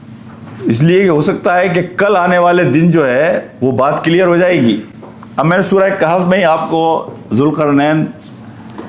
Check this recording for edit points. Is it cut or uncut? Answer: uncut